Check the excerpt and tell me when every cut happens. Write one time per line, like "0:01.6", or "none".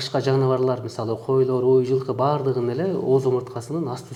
none